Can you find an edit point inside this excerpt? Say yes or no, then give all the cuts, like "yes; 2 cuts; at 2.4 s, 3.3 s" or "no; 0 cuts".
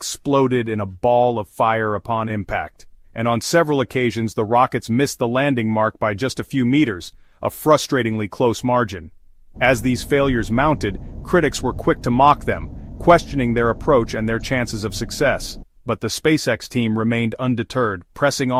no; 0 cuts